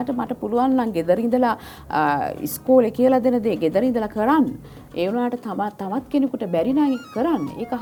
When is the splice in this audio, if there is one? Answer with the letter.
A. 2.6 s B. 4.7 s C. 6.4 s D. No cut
D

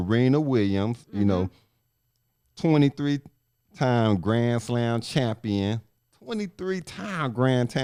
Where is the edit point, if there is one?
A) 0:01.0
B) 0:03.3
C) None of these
C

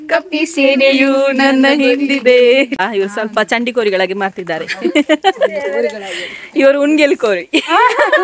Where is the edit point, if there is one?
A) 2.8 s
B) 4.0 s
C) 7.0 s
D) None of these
A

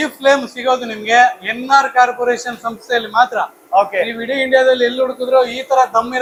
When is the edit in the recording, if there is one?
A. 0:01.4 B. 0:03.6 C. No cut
C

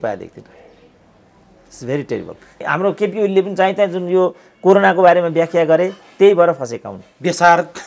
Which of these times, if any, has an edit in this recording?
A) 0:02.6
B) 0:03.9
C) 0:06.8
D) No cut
A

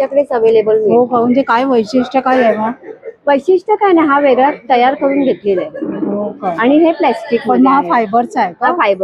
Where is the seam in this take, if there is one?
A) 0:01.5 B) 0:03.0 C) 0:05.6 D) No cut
D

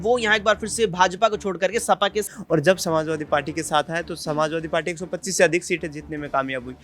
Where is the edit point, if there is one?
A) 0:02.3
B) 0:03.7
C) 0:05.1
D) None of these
A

